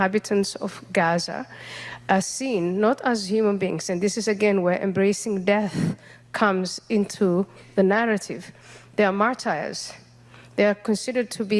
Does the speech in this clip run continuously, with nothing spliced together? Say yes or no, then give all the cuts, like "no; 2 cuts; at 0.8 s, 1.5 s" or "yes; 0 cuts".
yes; 0 cuts